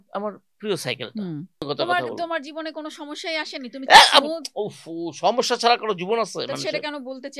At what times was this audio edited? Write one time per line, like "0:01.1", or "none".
0:01.7